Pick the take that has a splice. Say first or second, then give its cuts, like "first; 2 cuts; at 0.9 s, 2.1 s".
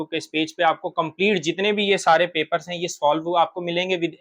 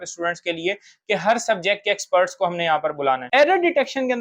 second; 1 cut; at 3.2 s